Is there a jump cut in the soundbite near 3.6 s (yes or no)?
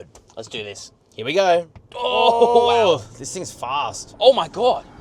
no